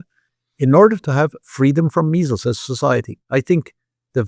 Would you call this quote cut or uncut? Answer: uncut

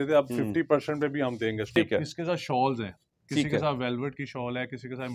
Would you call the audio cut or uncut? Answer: cut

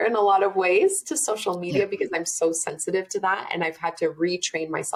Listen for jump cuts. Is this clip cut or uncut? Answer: uncut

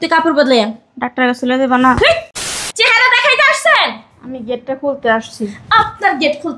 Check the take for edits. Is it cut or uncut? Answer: cut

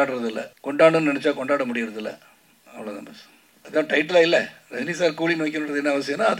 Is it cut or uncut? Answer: cut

